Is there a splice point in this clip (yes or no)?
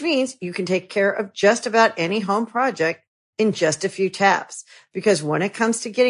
no